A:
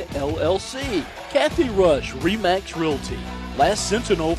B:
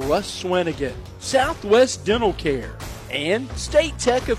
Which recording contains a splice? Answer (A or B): A